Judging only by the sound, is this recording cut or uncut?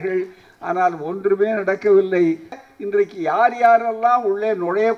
cut